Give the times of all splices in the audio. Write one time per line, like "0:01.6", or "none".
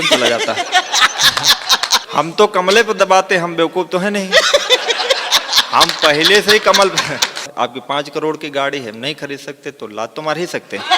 0:02.1
0:07.4